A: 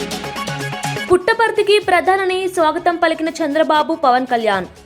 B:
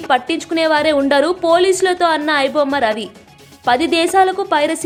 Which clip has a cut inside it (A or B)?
A